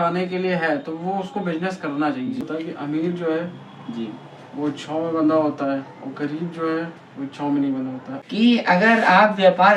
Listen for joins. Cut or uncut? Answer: cut